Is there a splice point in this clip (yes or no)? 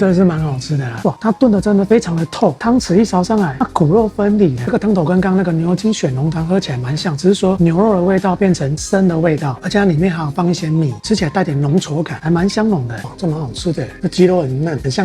yes